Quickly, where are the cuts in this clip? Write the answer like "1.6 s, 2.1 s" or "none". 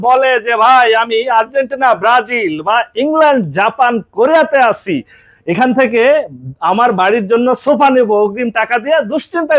none